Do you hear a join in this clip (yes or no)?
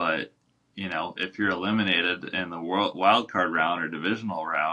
no